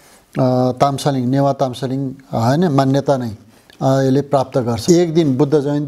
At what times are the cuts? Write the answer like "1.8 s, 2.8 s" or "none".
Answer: 4.8 s